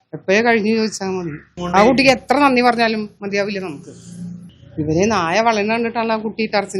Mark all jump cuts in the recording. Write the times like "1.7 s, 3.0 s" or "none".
1.5 s, 4.5 s